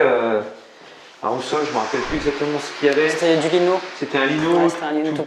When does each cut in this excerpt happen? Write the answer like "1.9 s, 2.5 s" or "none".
none